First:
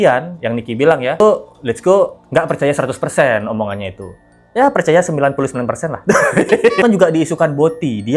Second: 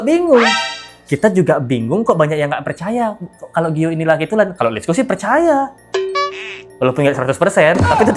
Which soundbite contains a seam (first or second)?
first